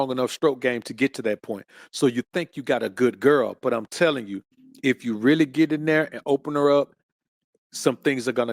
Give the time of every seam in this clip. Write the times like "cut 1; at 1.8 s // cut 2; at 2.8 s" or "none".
none